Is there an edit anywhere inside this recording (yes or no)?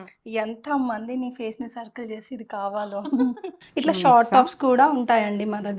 yes